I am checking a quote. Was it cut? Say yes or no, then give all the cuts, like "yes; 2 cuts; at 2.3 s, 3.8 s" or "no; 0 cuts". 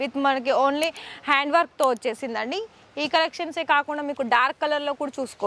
no; 0 cuts